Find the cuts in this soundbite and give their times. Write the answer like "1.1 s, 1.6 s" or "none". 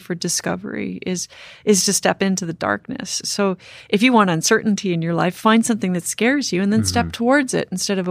none